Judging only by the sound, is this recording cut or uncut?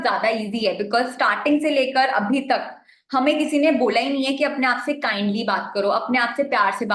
uncut